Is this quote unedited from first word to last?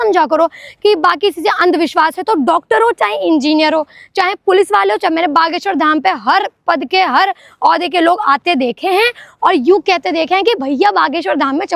yes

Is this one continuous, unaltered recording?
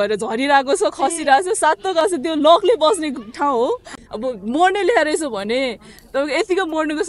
no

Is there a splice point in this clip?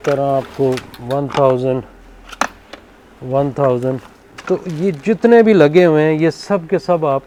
no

